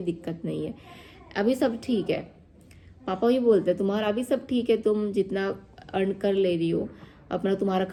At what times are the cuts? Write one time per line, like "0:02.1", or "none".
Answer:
none